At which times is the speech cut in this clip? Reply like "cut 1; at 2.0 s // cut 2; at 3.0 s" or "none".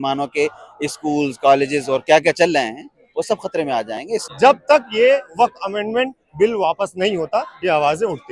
cut 1; at 4.3 s